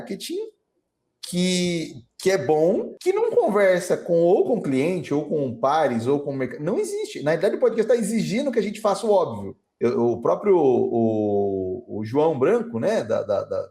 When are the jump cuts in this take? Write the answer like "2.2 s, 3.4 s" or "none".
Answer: 2.9 s, 9.7 s